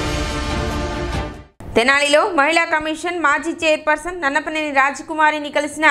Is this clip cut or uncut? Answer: uncut